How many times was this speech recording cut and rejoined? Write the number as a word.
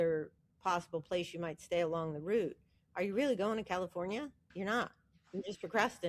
one